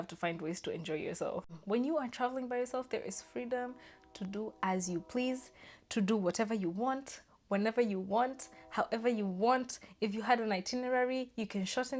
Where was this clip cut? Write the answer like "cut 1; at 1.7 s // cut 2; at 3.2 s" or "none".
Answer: cut 1; at 1.6 s